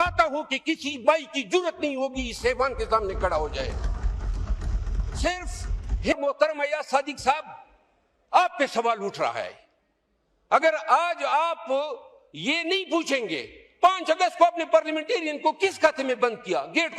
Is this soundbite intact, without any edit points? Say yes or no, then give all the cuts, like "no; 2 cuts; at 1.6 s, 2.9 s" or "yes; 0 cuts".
no; 1 cut; at 6.1 s